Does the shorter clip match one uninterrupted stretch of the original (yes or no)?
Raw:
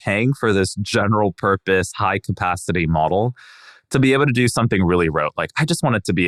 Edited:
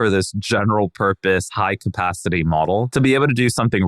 no